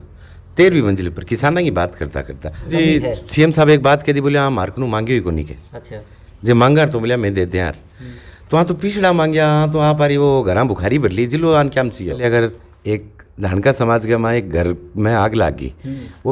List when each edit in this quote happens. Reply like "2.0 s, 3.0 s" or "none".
2.7 s, 12.2 s